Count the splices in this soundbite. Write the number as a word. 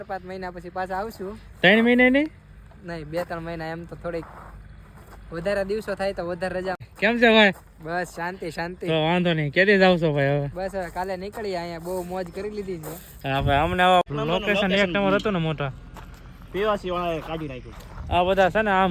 two